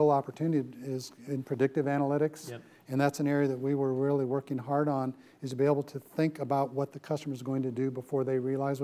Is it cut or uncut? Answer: uncut